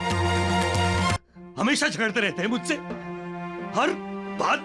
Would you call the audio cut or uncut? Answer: cut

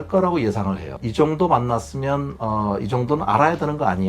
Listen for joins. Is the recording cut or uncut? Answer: cut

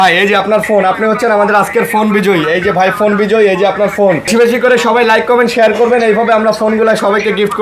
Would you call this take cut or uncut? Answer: cut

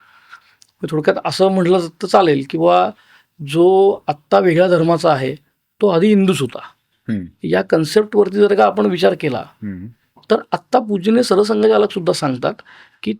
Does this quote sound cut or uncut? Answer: uncut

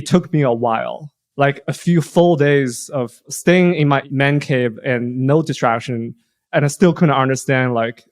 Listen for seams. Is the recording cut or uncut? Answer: cut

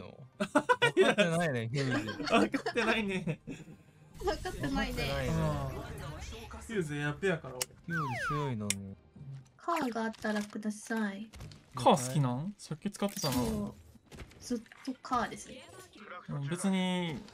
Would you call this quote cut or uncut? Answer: uncut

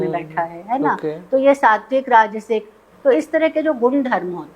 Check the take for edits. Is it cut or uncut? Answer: cut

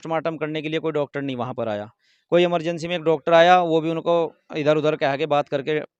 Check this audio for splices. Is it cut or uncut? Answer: uncut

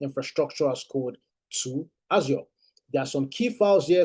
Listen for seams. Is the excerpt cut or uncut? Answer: uncut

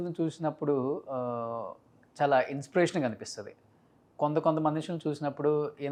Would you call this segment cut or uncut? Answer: uncut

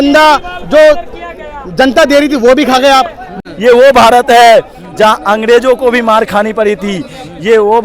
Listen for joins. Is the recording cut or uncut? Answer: cut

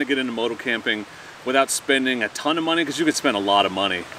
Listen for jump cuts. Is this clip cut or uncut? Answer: uncut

